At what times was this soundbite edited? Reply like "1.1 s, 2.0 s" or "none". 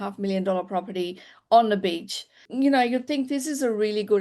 2.4 s